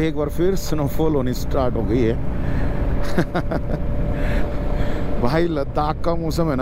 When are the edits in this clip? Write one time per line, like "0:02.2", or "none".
none